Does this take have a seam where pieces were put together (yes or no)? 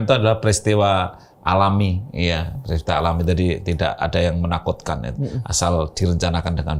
no